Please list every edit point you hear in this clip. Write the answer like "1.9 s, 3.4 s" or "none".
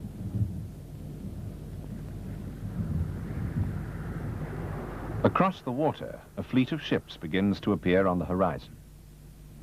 none